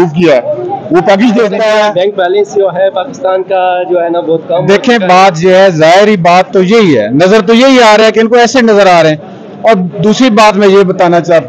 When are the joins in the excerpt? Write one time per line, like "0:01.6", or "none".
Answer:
0:01.6